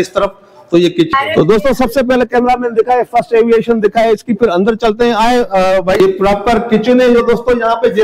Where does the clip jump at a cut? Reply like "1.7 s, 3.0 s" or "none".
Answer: 1.1 s, 6.0 s